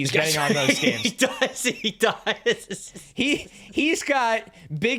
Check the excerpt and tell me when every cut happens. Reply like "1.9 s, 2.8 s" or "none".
none